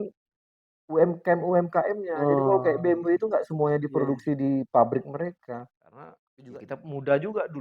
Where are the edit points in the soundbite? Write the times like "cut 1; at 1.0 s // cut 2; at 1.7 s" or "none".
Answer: cut 1; at 6.2 s

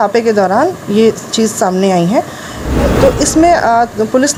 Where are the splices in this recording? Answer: none

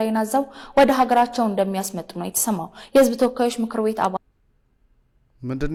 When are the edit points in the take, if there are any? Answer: none

